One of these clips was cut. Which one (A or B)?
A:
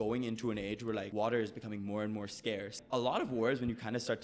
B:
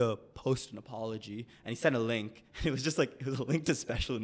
A